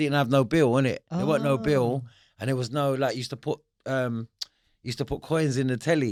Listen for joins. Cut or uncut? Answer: uncut